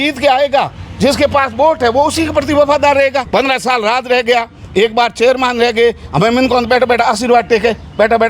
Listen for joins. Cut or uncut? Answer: cut